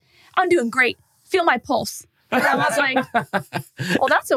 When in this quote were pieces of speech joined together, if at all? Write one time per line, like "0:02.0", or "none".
none